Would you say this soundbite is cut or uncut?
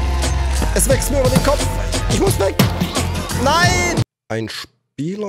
cut